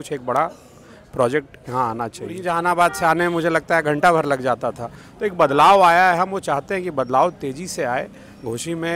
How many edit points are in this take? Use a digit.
1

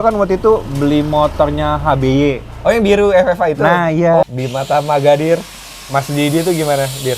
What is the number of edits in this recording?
1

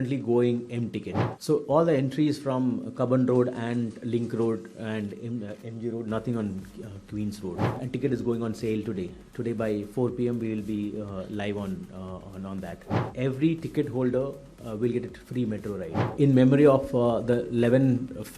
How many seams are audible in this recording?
4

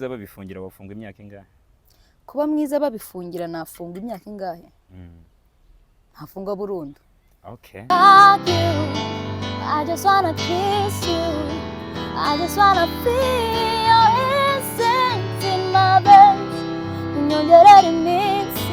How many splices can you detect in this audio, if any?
1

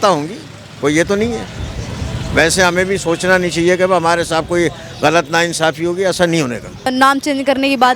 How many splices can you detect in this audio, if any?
1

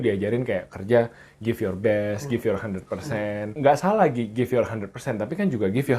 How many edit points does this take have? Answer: 1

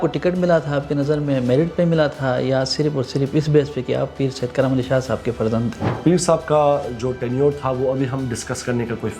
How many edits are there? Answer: 1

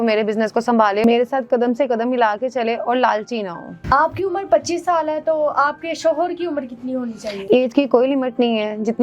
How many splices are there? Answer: 0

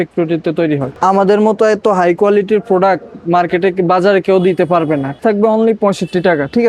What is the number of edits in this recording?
2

